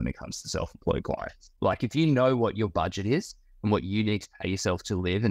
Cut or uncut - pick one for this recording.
cut